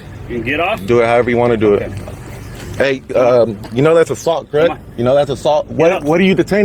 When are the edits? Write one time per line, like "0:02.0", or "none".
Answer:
none